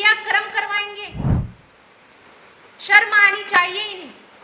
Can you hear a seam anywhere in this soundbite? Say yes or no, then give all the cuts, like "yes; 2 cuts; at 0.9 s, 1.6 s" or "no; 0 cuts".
yes; 2 cuts; at 1.1 s, 1.6 s